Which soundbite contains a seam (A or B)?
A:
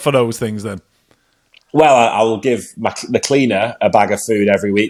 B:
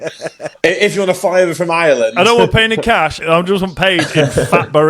B